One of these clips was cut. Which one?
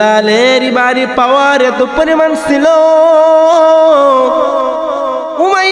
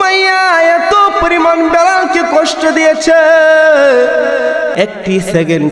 second; 1 cut; at 4.7 s

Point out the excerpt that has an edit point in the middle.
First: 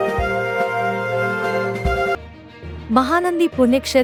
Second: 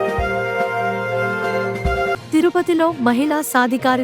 second; 1 cut; at 2.2 s

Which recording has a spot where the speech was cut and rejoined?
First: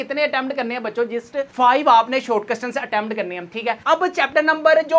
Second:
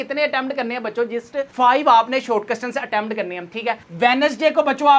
second; 1 cut; at 3.8 s

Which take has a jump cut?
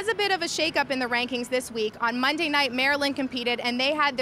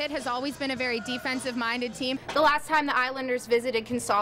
second; 1 cut; at 2.2 s

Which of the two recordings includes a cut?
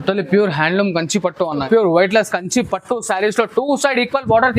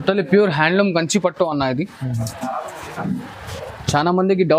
first; 1 cut; at 1.6 s

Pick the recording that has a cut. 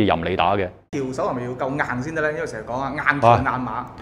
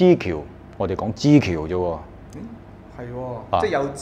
first; 1 cut; at 0.9 s

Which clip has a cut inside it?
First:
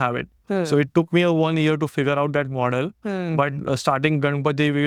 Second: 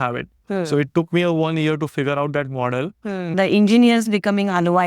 second; 1 cut; at 3.3 s

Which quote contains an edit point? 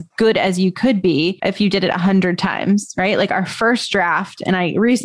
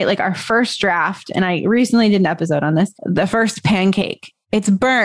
first; 1 cut; at 1.4 s

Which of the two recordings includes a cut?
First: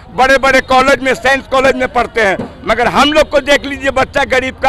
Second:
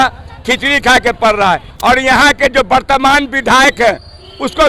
second; 1 cut; at 1.7 s

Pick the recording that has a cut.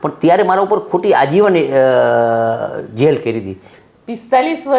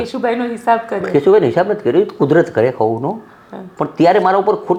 first; 1 cut; at 3.7 s

